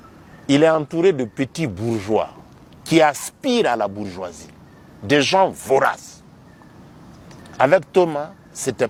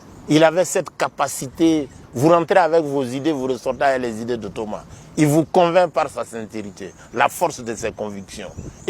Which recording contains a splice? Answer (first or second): second